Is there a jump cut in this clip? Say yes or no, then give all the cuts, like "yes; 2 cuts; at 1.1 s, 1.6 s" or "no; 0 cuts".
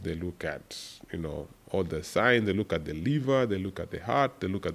no; 0 cuts